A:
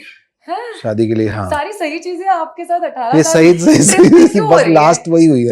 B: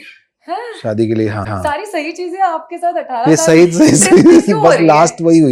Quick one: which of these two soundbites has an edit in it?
A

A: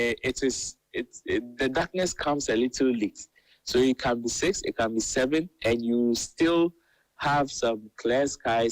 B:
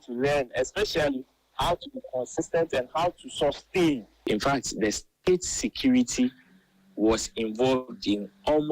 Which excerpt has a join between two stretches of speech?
B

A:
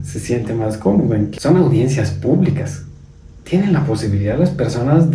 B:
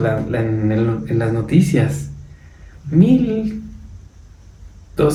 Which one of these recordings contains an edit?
A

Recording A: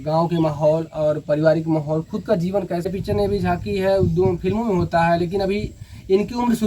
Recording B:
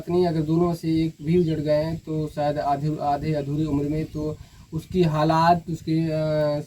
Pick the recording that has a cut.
A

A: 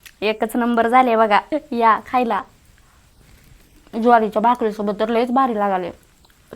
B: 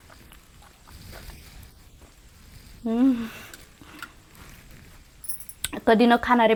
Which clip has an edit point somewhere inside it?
A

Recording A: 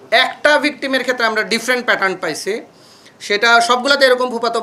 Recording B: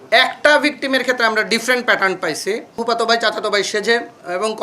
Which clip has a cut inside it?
B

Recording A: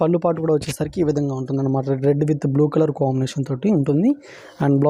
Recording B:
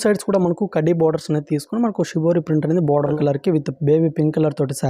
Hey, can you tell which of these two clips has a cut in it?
B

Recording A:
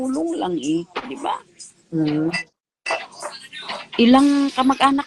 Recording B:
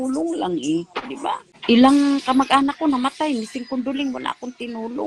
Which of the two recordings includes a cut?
B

